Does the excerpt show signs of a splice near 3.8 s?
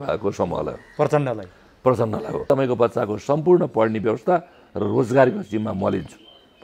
no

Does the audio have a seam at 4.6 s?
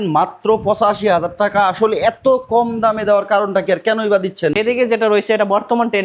yes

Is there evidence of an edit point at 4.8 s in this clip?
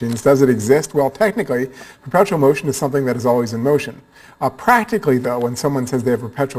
yes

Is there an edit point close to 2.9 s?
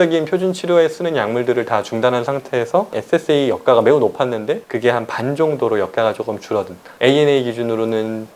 yes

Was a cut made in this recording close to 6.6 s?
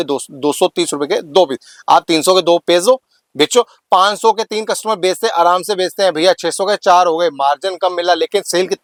no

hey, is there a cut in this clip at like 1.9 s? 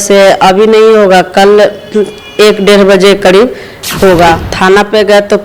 no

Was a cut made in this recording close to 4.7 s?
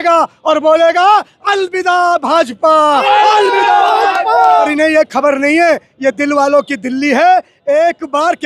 yes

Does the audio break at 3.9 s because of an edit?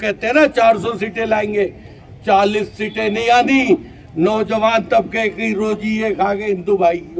no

